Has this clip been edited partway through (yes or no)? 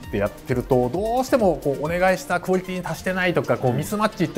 no